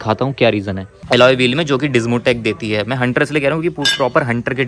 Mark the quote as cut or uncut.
cut